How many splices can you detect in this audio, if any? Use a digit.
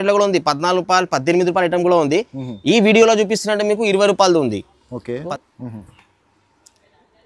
1